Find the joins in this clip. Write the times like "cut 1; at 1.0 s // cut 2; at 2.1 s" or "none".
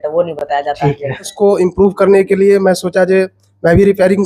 cut 1; at 1.3 s